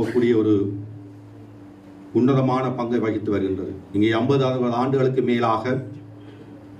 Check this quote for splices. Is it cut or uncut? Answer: cut